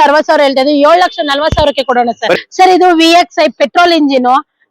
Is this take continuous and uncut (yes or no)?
no